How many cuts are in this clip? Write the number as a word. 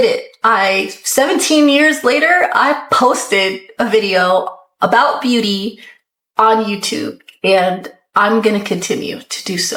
zero